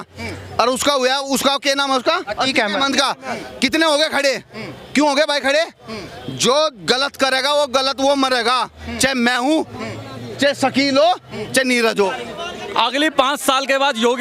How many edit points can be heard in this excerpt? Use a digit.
1